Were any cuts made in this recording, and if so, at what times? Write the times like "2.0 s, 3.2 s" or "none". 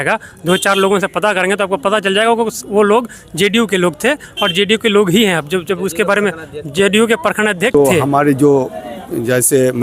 7.8 s